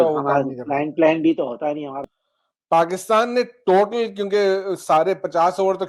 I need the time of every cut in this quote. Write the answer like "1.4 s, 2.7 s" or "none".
2.0 s

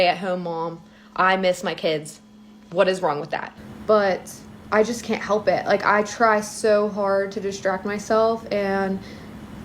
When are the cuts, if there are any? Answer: 3.5 s

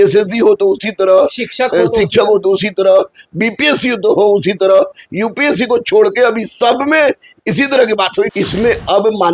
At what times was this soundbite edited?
8.3 s

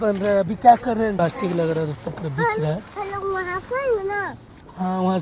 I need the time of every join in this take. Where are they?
1.2 s

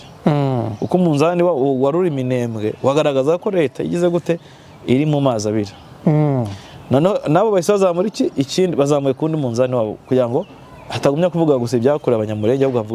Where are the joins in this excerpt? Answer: none

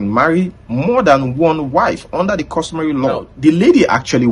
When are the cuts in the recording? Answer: 3.3 s

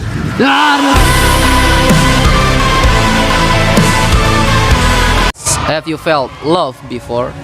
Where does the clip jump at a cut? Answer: 1.0 s, 5.3 s

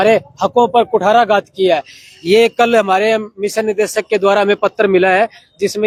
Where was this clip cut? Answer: none

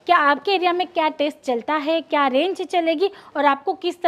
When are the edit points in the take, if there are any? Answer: none

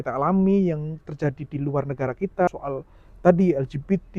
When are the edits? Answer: 2.5 s

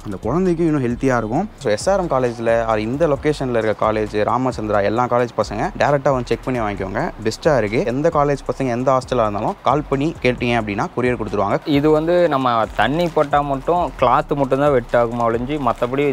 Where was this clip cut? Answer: 1.6 s, 5.7 s, 7.9 s, 9.6 s, 11.6 s

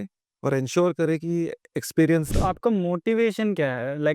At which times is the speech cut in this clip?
2.3 s

